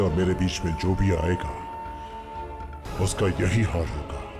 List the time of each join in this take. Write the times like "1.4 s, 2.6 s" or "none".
none